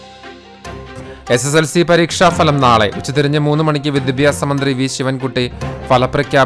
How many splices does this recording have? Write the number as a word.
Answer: one